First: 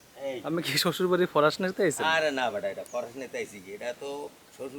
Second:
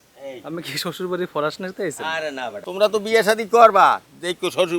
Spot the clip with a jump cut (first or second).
second